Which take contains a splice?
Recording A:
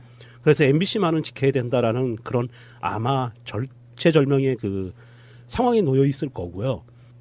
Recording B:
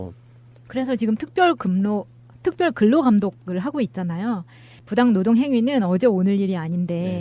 A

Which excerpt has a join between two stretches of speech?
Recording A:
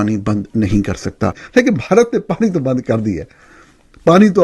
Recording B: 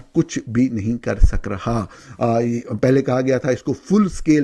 A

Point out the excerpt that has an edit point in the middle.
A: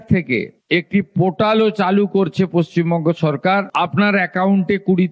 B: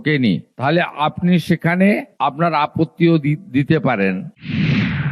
B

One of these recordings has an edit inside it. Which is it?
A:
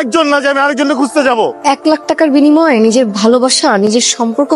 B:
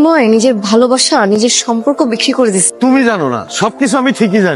A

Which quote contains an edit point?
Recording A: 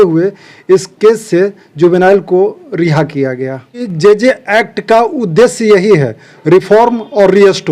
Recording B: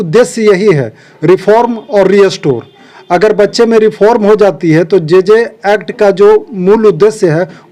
A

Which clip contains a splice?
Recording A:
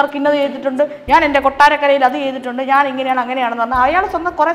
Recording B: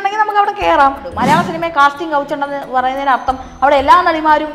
B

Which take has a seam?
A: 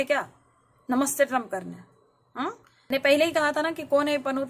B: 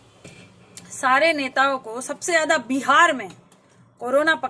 A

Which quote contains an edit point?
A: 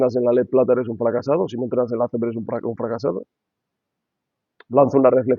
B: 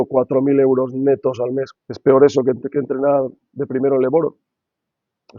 B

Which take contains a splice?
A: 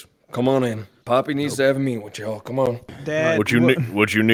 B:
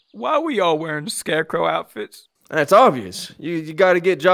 A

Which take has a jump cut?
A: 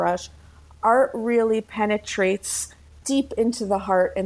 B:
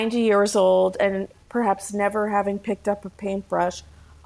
A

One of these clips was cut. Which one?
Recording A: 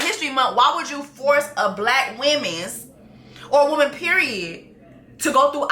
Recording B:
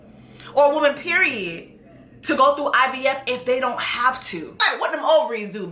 B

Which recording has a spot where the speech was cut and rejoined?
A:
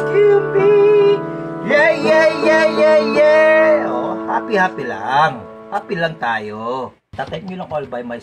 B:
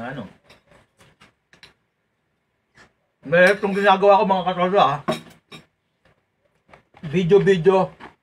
A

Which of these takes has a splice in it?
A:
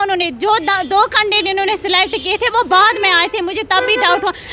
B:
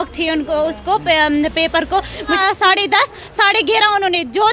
B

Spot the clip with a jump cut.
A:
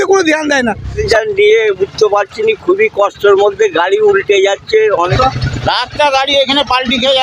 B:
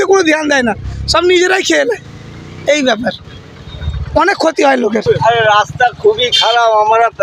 A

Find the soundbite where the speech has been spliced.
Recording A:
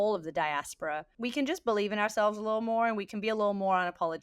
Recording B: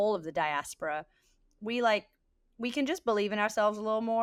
A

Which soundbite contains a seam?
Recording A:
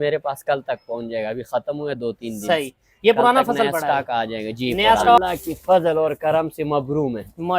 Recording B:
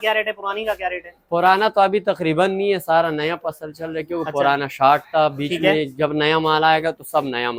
A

